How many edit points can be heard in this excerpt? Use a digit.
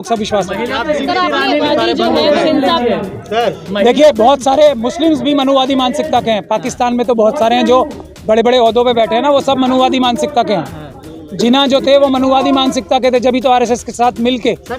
1